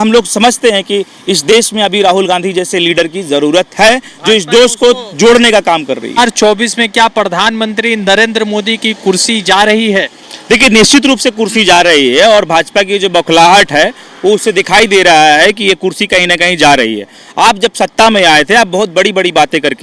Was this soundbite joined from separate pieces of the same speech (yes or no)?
yes